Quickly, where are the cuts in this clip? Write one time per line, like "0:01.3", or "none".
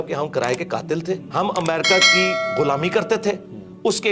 0:01.3